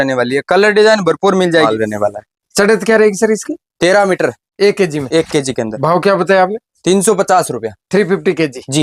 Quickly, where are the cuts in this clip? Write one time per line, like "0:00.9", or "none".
0:01.7